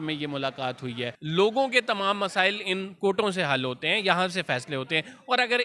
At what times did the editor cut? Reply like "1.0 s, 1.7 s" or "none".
1.2 s

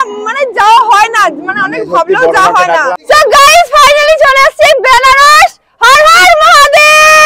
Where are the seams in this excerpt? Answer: 3.0 s

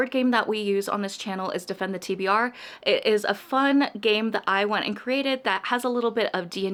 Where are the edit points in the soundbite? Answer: none

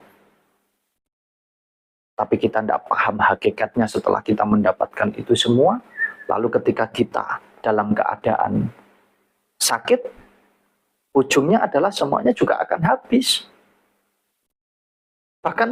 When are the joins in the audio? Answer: none

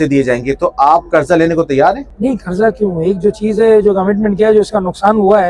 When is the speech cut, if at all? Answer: 2.1 s

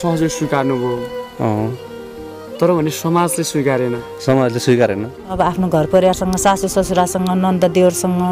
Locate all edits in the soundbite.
5.3 s

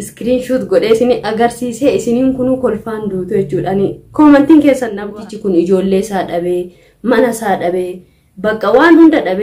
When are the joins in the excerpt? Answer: 4.9 s

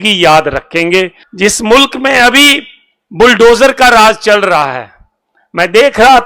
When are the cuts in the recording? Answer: 1.2 s

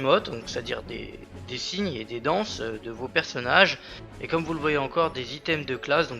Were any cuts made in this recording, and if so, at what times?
2.7 s

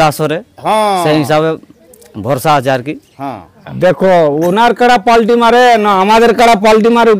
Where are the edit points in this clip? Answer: 3.6 s

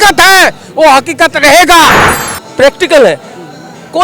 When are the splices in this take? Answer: 2.0 s

